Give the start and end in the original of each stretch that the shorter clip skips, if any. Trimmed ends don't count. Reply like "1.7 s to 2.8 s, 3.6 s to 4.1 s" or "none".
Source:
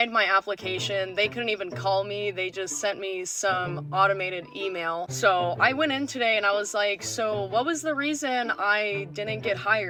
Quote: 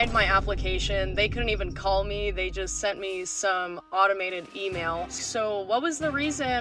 5.1 s to 7.0 s

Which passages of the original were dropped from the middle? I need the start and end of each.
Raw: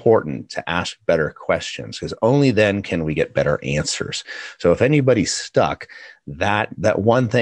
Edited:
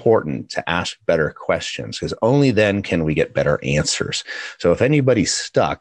none

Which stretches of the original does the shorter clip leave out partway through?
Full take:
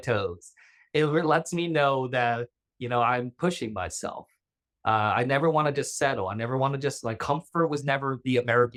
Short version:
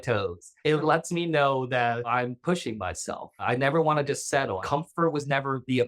0.8 s to 1.2 s, 2.5 s to 3.1 s, 4.4 s to 5.1 s, 6.3 s to 7.2 s

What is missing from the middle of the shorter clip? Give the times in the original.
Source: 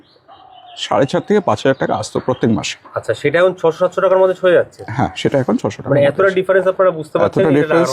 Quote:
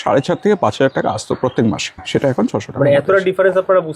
2.9 s to 5.1 s

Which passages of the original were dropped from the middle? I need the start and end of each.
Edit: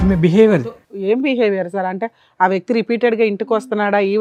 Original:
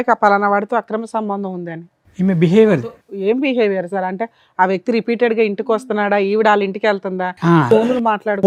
none

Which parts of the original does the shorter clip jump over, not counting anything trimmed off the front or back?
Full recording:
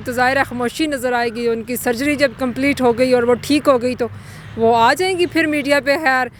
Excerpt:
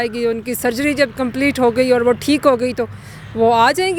none

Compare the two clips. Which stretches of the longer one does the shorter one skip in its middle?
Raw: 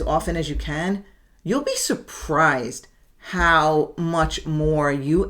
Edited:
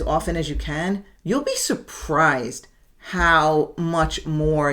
1.1 s to 1.3 s

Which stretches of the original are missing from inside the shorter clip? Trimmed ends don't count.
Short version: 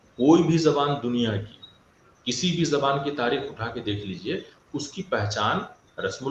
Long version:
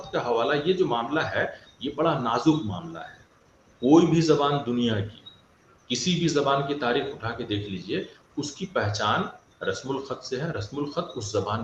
none

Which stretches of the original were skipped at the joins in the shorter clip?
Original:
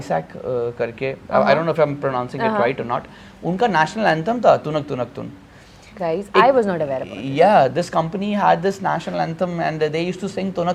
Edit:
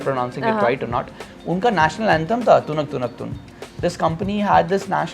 5.8 s to 7.7 s

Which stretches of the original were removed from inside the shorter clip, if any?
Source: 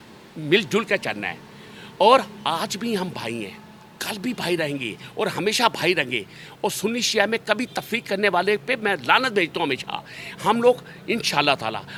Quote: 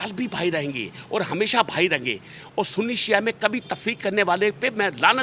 none

